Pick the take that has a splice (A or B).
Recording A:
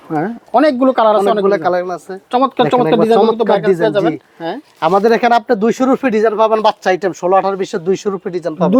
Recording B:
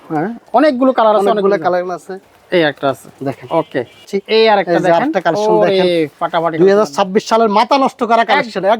B